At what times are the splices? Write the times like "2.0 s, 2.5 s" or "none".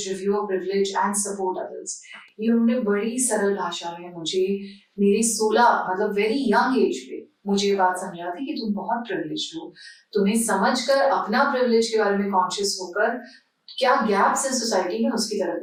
none